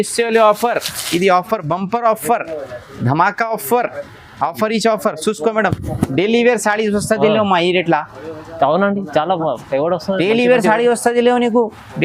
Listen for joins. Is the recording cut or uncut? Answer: uncut